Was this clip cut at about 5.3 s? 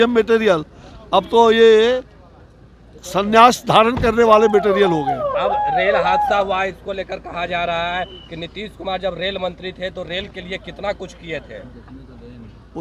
yes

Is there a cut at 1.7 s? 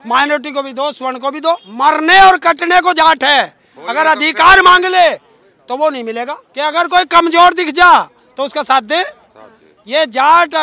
yes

